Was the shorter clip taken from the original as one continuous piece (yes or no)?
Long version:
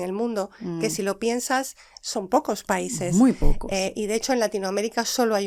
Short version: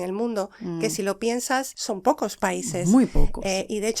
no